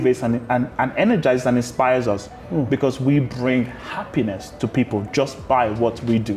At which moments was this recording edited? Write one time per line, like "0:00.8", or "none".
none